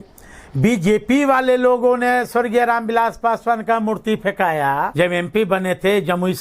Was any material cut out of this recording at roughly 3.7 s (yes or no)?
no